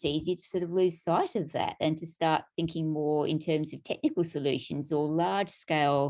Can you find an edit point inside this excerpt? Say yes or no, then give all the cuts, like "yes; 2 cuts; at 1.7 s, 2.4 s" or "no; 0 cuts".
no; 0 cuts